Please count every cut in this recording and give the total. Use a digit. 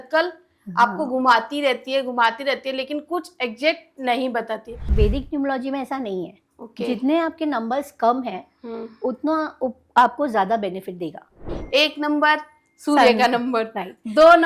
2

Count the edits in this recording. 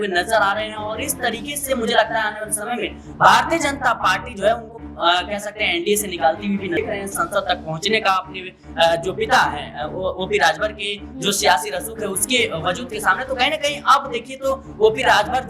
1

